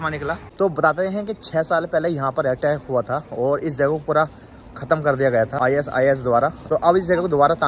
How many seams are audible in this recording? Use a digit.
3